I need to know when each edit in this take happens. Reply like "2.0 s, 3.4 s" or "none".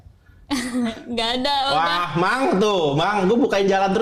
none

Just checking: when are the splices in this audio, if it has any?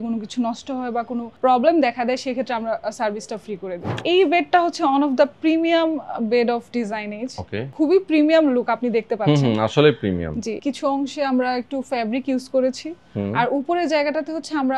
4.0 s, 7.6 s, 10.6 s

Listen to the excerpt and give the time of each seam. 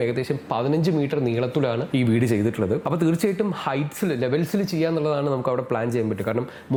none

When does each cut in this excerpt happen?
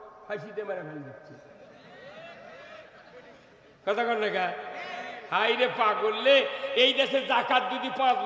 none

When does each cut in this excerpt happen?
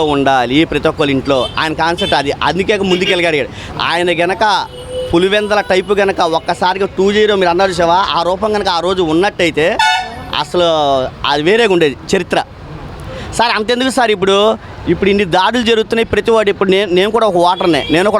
none

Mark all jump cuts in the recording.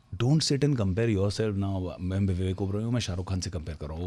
none

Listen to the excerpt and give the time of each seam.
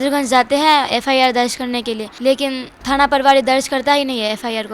2.1 s, 2.7 s

